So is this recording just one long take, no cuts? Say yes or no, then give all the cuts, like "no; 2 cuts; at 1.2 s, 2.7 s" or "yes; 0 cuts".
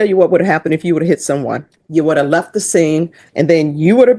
no; 2 cuts; at 1.8 s, 3.2 s